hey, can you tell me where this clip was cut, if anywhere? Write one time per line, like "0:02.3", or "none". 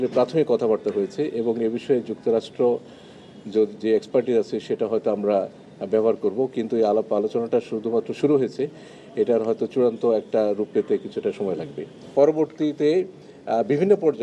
0:11.8

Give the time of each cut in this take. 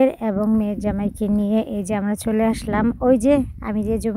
none

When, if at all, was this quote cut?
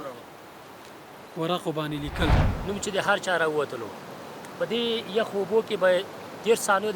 0:02.5

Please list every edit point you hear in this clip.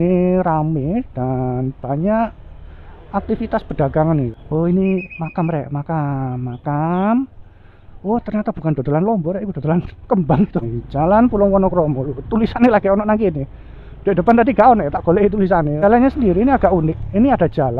0:04.4
0:10.7
0:15.8

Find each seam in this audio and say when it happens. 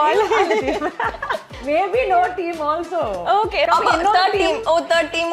0:01.5
0:03.7

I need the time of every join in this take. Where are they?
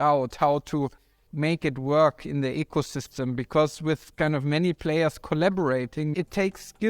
0:01.2
0:06.1

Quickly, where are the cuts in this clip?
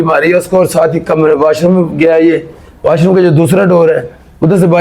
none

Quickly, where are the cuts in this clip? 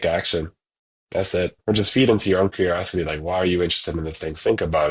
0:01.6

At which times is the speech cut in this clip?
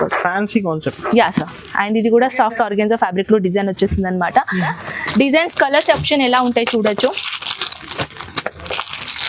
0:04.7

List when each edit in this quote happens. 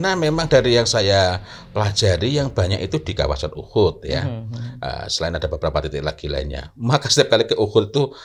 none

